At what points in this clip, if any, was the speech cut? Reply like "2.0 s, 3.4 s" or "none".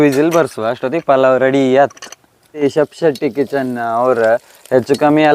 2.6 s